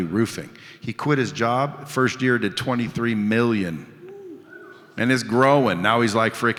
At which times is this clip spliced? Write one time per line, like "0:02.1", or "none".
none